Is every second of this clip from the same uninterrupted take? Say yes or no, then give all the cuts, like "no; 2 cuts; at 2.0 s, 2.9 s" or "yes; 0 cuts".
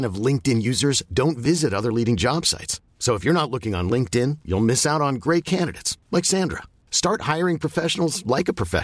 yes; 0 cuts